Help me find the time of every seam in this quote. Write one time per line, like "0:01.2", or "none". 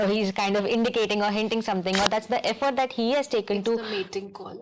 none